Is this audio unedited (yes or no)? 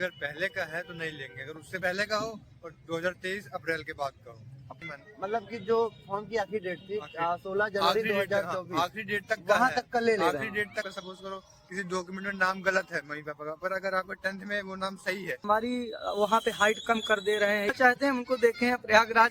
no